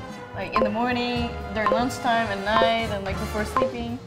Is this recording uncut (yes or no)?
yes